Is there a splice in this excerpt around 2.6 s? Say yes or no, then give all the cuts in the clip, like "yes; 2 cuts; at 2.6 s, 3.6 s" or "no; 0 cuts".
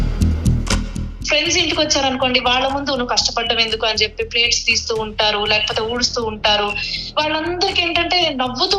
no; 1 cut; at 1.1 s